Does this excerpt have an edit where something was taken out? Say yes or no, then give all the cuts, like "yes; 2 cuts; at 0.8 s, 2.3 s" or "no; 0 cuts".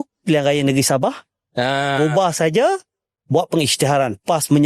no; 0 cuts